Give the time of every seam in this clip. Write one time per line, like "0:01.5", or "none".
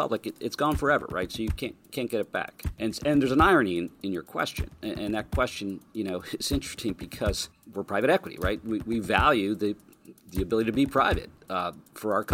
0:02.6
0:07.5